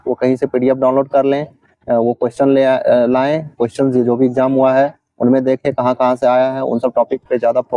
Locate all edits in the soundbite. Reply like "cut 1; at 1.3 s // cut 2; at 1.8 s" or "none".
none

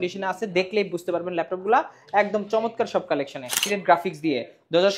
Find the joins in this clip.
cut 1; at 3.6 s

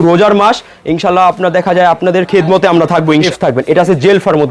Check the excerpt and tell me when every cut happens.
cut 1; at 3.3 s

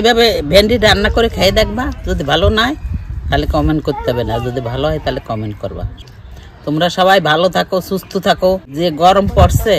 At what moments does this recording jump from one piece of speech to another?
cut 1; at 6.0 s // cut 2; at 8.7 s

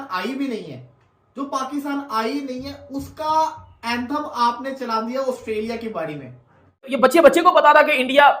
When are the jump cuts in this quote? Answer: cut 1; at 6.9 s

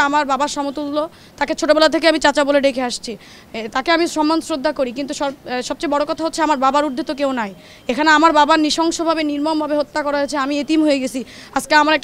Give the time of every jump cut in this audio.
none

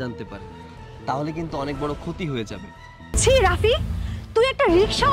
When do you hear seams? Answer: cut 1; at 3.1 s

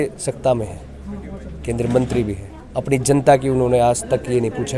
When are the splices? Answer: cut 1; at 2.5 s

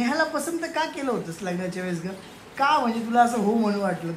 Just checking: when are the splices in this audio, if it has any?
none

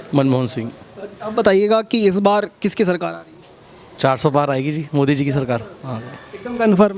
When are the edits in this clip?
none

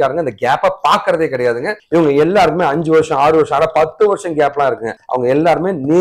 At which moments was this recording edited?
cut 1; at 1.7 s

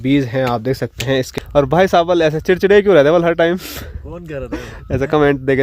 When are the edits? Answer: cut 1; at 1.3 s

